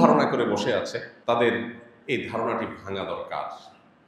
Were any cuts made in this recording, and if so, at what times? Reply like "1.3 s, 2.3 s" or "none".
1.1 s